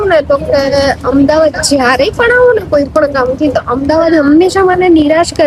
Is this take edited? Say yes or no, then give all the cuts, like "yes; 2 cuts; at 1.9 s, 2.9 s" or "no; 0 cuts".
no; 0 cuts